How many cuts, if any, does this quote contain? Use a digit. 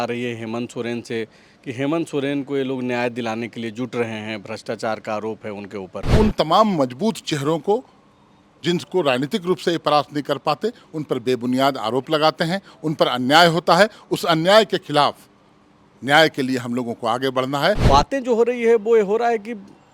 2